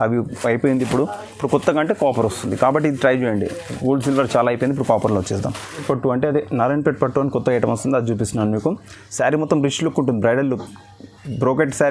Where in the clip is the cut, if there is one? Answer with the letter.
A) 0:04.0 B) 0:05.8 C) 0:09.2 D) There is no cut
B